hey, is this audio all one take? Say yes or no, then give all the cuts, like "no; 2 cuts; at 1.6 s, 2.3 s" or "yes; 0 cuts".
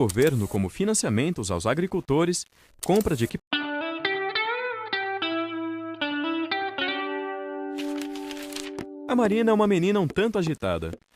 yes; 0 cuts